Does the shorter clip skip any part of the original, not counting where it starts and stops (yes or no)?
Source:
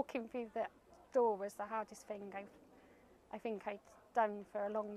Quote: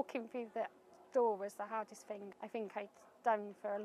yes